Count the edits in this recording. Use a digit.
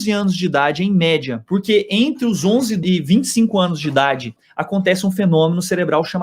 3